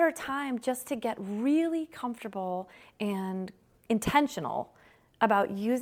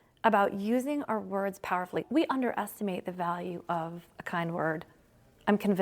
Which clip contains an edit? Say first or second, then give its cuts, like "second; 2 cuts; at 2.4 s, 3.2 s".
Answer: second; 1 cut; at 2.1 s